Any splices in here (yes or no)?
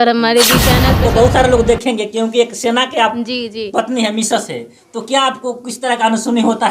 yes